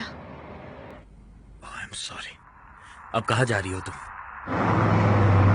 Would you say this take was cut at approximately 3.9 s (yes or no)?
no